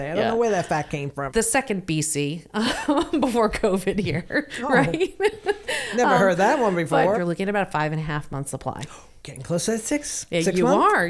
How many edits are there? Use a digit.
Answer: 2